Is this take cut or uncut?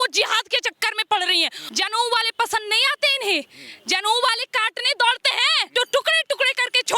cut